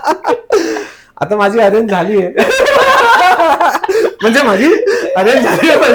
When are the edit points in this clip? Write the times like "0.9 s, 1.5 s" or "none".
none